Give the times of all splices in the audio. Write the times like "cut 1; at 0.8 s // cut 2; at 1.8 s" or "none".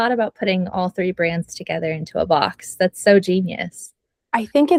none